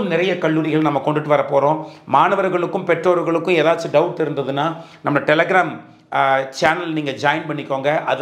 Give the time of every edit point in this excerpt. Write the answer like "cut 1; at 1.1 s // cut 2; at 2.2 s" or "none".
none